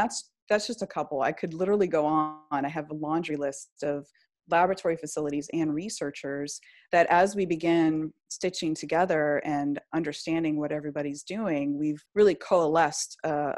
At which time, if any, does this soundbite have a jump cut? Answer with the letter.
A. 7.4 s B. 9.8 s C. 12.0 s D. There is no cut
C